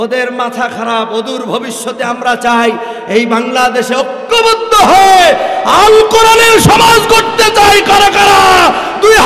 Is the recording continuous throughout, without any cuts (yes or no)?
yes